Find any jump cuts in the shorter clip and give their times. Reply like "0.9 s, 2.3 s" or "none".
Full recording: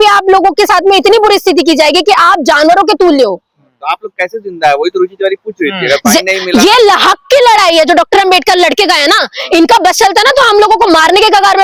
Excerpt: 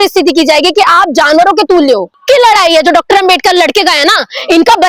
2.2 s

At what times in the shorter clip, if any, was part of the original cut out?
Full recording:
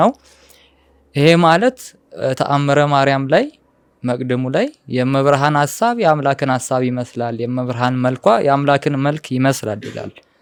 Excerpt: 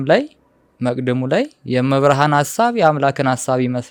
none

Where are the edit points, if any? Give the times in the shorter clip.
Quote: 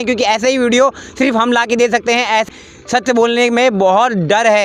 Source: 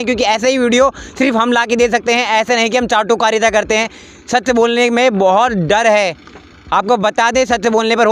2.5 s

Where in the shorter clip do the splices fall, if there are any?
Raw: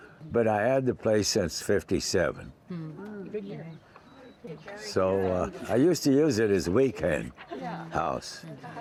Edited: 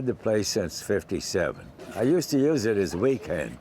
1.8 s

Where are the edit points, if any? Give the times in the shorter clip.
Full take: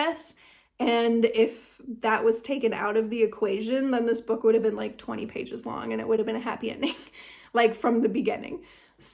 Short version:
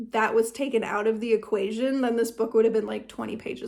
none

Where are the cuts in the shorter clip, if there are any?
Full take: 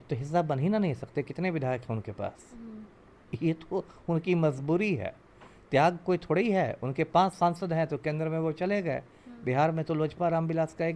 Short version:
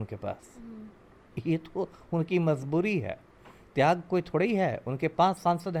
none

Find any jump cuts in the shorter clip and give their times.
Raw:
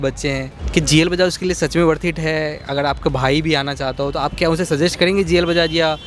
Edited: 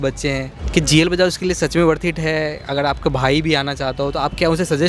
none

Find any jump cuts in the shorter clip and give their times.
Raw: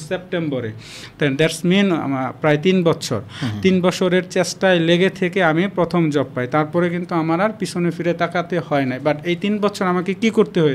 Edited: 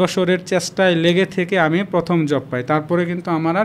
none

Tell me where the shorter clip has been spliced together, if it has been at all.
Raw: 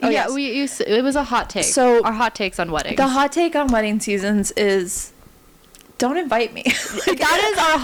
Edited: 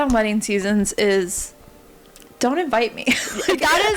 none

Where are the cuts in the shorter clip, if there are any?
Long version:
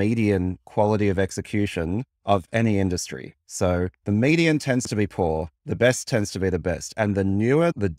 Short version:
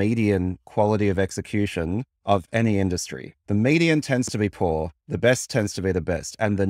3.4 s

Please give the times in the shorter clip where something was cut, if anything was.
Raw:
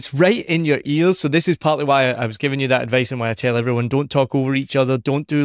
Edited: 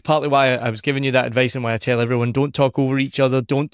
none

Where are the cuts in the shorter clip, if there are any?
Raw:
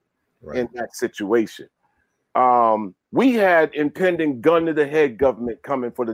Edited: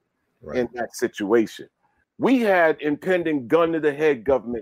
2.0 s

